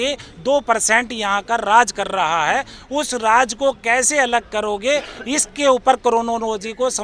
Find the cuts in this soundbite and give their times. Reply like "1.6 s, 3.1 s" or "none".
none